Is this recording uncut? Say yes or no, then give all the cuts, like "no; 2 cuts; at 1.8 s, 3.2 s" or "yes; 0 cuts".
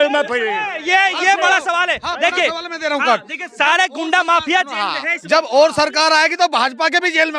yes; 0 cuts